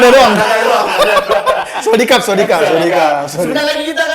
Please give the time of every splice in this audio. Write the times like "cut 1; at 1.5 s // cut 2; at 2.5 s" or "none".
none